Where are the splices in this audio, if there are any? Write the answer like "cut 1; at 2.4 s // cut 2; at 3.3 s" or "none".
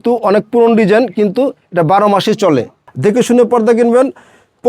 cut 1; at 2.8 s